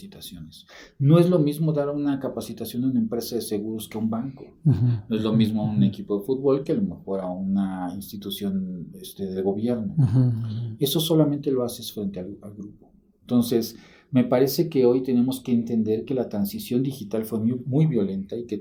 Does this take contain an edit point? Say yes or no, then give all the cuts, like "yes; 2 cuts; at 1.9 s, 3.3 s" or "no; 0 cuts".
no; 0 cuts